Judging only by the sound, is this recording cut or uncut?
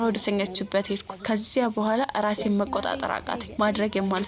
uncut